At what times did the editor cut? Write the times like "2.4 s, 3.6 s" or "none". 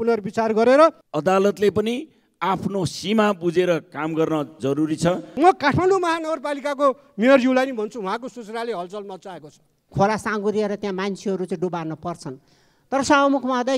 1.1 s, 5.3 s, 9.8 s